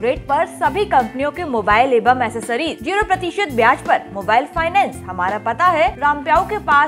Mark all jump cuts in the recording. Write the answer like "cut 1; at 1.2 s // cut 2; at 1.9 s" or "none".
cut 1; at 2.8 s // cut 2; at 6.0 s